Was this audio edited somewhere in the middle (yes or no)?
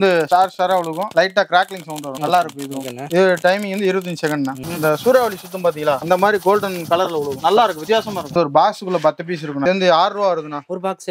yes